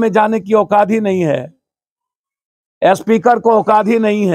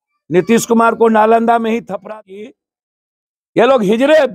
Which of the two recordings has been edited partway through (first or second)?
second